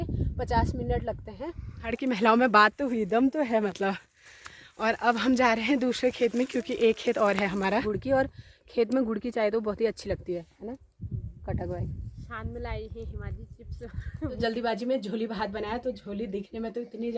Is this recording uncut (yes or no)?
no